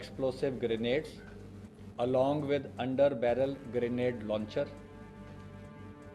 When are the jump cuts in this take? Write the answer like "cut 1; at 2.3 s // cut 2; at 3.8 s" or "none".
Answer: none